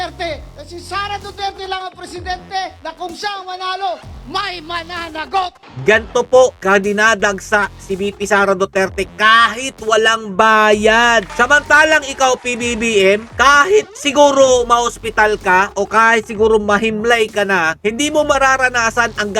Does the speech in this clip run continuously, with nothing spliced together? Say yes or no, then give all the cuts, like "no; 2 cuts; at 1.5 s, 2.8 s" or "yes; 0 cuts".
no; 3 cuts; at 2.8 s, 5.6 s, 11.3 s